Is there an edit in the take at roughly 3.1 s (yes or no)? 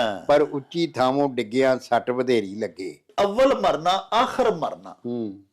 yes